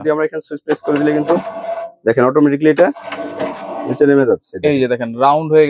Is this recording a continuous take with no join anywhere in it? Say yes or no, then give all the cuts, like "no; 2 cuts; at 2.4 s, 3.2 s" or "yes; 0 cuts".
yes; 0 cuts